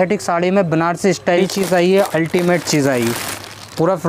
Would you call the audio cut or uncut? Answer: cut